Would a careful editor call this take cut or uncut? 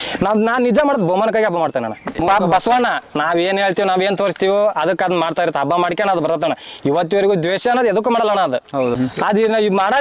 cut